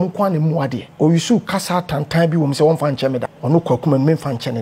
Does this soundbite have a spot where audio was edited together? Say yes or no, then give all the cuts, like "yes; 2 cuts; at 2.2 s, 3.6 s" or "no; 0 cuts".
yes; 2 cuts; at 0.8 s, 3.3 s